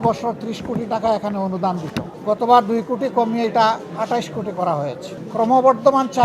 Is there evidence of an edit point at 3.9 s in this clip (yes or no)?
no